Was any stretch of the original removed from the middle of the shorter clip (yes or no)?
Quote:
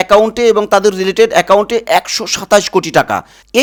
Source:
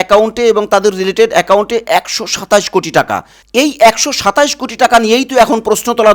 no